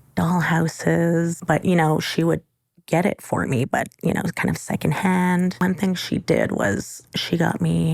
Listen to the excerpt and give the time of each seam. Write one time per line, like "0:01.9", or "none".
0:01.4
0:05.6